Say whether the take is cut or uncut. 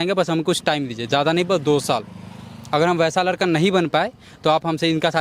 uncut